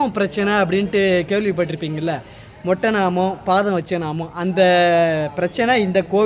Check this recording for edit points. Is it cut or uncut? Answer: uncut